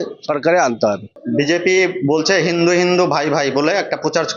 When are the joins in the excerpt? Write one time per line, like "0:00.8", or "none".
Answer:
0:01.2